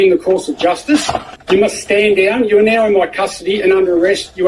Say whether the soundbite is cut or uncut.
cut